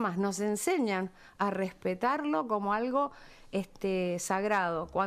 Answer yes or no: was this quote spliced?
no